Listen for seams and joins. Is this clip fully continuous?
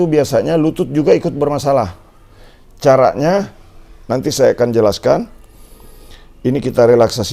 yes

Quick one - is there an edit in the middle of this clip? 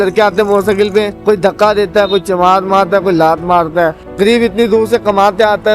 yes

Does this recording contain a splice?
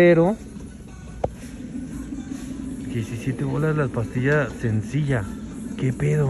no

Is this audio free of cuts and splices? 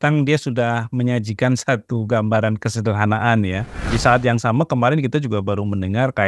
no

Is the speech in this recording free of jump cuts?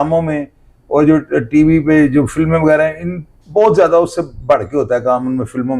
yes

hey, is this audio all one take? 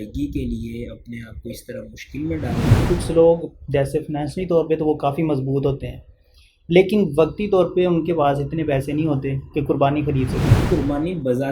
no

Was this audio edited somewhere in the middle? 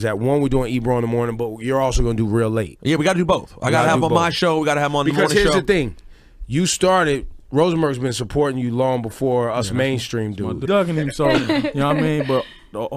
no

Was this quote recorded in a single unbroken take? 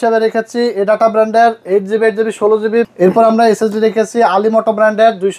no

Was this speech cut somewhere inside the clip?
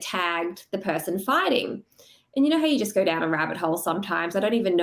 no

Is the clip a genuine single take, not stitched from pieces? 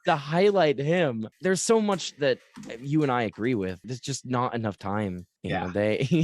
no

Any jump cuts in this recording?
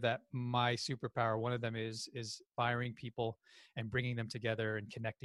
no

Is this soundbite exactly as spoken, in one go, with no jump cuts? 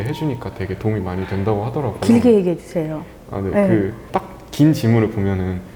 yes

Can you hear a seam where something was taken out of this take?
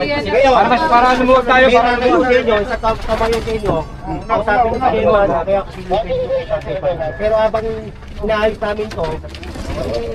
no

